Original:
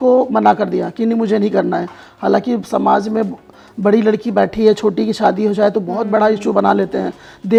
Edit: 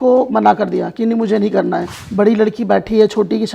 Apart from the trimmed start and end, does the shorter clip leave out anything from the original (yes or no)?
yes